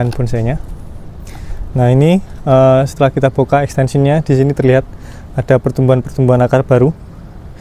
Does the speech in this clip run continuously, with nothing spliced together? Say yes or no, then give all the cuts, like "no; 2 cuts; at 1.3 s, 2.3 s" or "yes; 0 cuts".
yes; 0 cuts